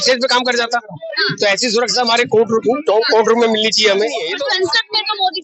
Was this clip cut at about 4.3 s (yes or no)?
yes